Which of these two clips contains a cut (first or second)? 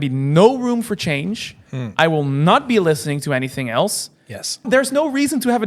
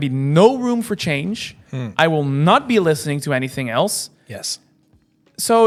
first